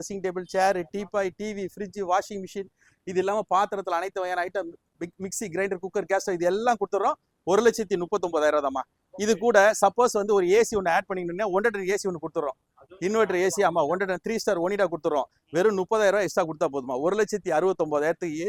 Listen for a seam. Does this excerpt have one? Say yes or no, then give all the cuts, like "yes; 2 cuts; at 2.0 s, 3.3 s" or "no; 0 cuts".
no; 0 cuts